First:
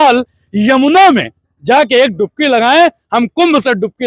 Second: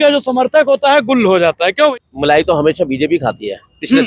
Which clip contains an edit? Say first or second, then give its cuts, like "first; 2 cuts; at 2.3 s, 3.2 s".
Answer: second; 1 cut; at 1.9 s